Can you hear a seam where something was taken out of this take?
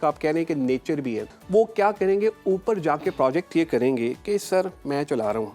yes; 1 cut; at 1.3 s

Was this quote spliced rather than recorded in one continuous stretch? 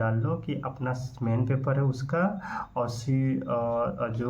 no; 0 cuts

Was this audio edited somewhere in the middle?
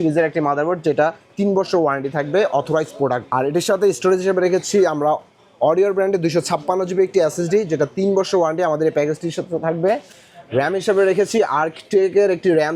no; 0 cuts

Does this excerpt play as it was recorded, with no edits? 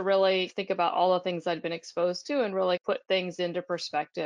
yes; 0 cuts

